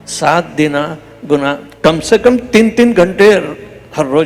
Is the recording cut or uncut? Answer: uncut